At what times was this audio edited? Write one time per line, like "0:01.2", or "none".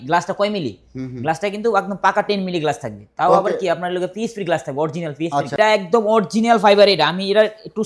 0:05.5